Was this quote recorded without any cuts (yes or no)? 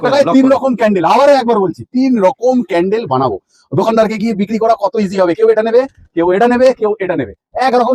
yes